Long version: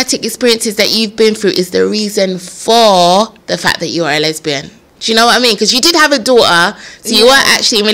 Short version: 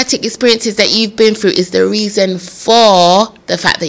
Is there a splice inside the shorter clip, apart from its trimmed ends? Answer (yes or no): no